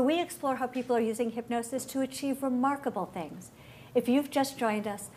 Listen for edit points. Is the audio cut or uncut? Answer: cut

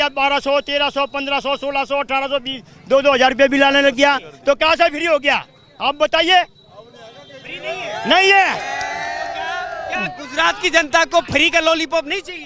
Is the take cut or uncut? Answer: uncut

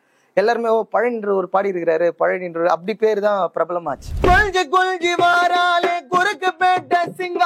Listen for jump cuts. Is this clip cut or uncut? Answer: cut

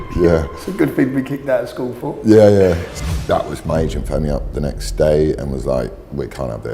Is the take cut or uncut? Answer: cut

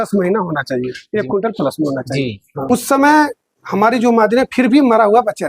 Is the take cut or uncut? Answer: cut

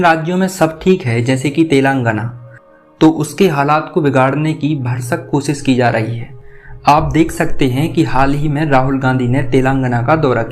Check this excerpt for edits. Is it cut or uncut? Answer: uncut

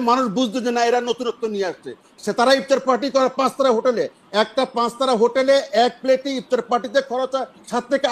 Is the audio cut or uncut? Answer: uncut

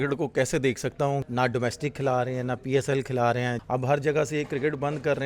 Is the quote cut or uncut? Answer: cut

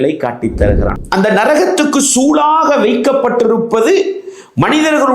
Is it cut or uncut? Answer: cut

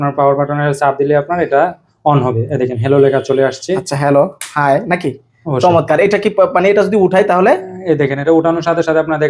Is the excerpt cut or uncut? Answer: uncut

